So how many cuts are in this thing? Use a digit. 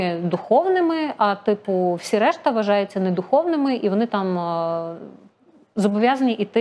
0